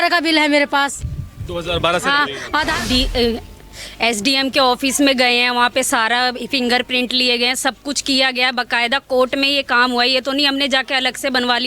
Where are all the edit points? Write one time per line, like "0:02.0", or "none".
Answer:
0:02.7